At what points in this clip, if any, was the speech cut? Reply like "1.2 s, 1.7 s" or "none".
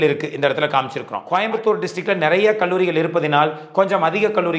1.1 s

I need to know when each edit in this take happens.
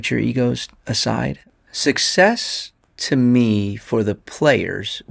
1.4 s

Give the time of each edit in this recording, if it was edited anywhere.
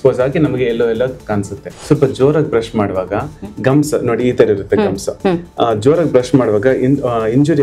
1.7 s

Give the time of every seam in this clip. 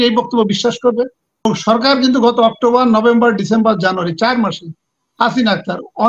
1.5 s

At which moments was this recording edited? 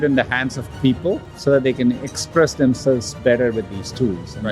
1.3 s

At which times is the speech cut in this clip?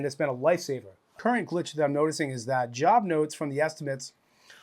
1.2 s

